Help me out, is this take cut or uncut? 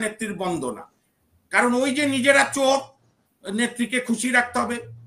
uncut